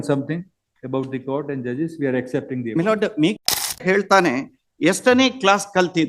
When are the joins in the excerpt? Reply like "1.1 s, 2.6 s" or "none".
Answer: 3.8 s